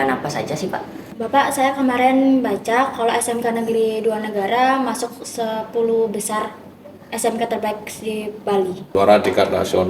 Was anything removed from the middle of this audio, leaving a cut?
yes; 2 cuts; at 1.0 s, 8.9 s

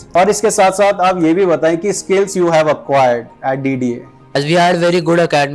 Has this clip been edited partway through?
yes; 1 cut; at 4.2 s

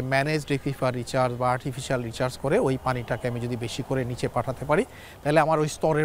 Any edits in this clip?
no; 0 cuts

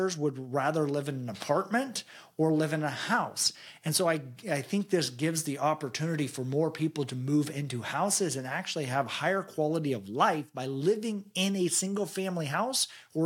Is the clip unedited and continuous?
yes; 0 cuts

